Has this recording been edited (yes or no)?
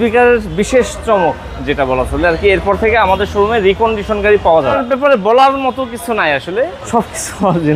yes